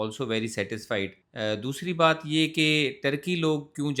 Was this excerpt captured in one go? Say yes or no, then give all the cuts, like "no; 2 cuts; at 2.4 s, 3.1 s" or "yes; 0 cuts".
yes; 0 cuts